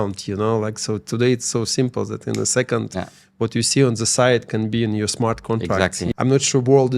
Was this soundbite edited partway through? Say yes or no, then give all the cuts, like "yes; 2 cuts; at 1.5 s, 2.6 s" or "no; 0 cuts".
yes; 1 cut; at 6.1 s